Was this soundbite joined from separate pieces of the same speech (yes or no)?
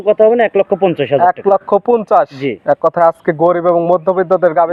no